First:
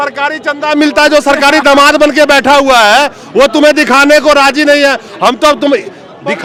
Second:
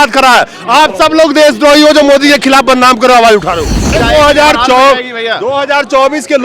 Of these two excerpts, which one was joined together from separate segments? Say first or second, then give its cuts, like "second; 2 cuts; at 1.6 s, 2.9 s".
second; 1 cut; at 4.0 s